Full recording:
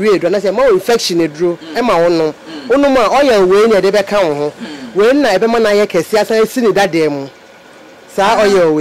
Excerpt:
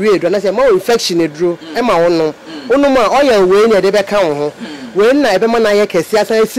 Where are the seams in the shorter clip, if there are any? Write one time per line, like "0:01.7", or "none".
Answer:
none